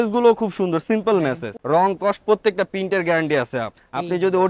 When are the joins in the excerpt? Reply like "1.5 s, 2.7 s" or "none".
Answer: 1.5 s